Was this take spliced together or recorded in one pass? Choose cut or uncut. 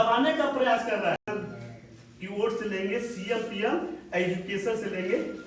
cut